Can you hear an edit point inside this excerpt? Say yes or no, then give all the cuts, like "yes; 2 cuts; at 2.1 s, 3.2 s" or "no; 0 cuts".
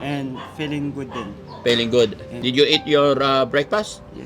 yes; 1 cut; at 2.3 s